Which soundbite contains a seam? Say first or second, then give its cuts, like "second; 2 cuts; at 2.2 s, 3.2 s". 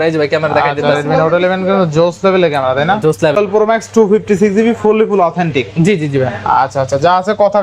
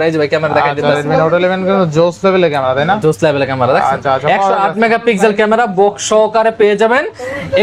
first; 1 cut; at 3.4 s